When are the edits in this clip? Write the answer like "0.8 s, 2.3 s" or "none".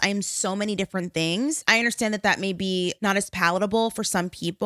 1.6 s, 3.1 s